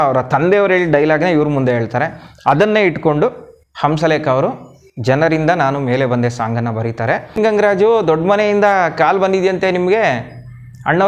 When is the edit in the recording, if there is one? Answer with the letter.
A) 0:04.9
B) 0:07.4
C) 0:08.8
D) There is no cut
B